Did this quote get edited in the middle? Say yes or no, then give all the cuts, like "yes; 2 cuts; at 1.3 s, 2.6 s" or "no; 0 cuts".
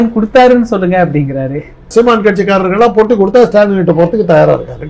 yes; 1 cut; at 1.9 s